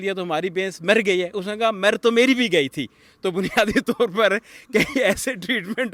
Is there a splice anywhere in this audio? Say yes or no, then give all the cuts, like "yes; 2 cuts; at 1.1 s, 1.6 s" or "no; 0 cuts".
no; 0 cuts